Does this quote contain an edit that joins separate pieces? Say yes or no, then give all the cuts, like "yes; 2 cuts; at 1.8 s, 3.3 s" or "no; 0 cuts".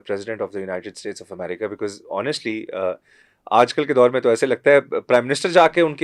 no; 0 cuts